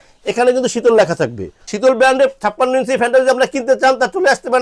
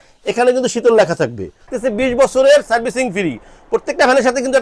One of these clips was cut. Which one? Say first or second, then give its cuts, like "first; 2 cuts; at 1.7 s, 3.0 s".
second; 1 cut; at 1.7 s